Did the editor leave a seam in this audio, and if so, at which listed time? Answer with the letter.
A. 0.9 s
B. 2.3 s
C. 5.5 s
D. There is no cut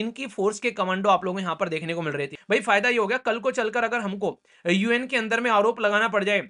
B